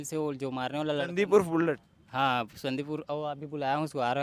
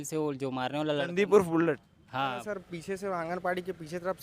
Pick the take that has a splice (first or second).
second